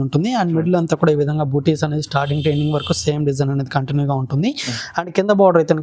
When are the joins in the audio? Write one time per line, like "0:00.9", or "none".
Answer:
none